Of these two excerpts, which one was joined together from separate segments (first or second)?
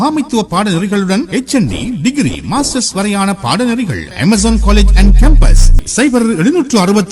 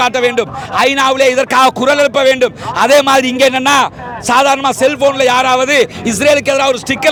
first